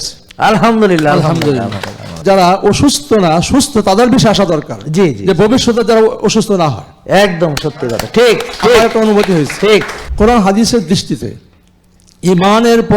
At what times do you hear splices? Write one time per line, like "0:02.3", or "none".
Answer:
0:02.2
0:10.0

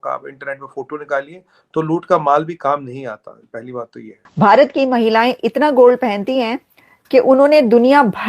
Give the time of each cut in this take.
0:04.2

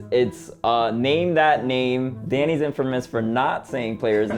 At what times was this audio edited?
0:02.2

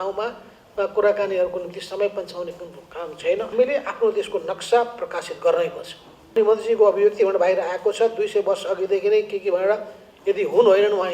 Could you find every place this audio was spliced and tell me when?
0:03.5
0:06.3

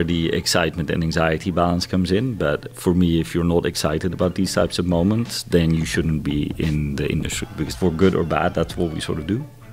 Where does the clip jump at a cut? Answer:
0:07.7

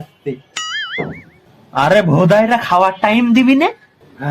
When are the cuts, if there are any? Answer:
0:01.4

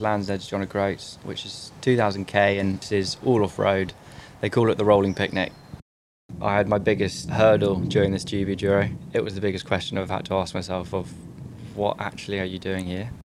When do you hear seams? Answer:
0:01.2
0:02.8
0:06.1
0:07.2
0:09.0

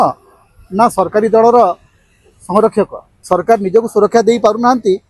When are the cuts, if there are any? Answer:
0:03.1

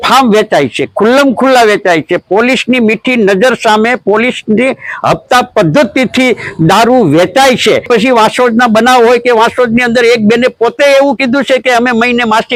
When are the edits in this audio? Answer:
none

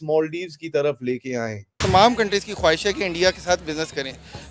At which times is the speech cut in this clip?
0:01.8

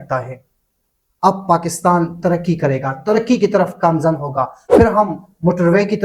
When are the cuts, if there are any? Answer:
0:04.6

